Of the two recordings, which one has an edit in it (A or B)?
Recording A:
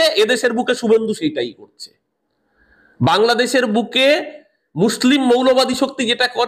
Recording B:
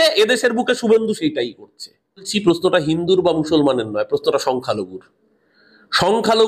B